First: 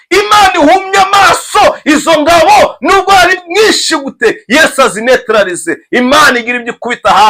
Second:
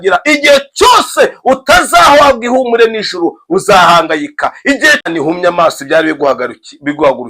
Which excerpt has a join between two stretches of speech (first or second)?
second